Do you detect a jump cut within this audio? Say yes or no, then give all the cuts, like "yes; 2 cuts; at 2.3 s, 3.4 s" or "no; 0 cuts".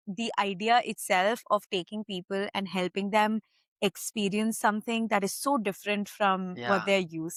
no; 0 cuts